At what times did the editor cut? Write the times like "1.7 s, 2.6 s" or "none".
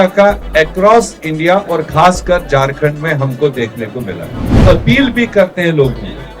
4.6 s